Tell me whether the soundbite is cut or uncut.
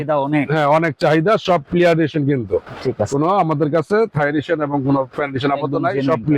uncut